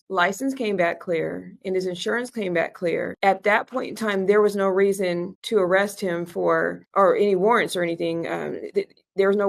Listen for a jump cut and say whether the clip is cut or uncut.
uncut